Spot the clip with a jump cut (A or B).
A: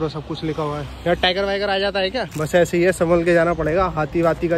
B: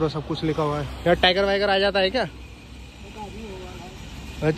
A